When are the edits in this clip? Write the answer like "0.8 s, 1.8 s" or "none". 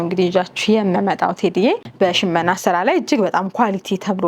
1.9 s